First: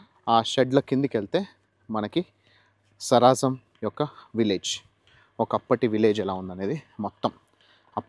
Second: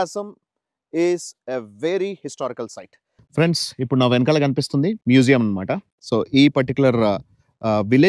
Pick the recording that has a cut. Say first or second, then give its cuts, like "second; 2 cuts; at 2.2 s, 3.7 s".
second; 1 cut; at 3.2 s